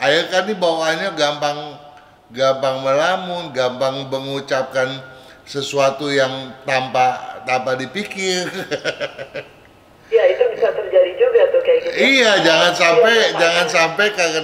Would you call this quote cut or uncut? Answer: uncut